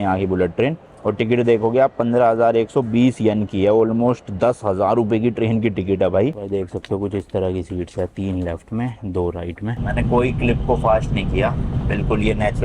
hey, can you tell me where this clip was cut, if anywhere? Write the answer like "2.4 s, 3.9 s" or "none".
6.4 s, 9.8 s